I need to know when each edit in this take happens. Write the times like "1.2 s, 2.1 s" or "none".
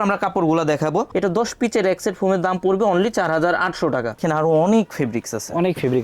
1.1 s, 4.2 s